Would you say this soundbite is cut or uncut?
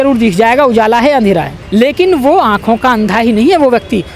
cut